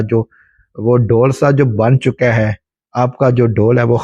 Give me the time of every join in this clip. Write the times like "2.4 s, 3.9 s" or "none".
none